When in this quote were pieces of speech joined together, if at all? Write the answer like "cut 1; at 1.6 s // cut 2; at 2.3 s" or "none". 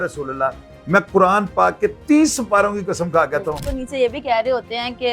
cut 1; at 3.7 s